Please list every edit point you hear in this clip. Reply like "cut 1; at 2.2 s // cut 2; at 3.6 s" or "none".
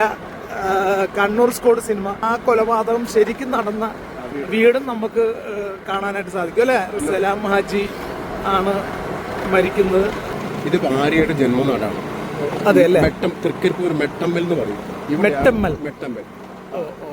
cut 1; at 2.2 s // cut 2; at 7.0 s // cut 3; at 10.3 s